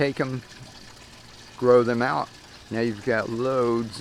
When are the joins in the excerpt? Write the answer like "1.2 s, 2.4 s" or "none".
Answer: 2.1 s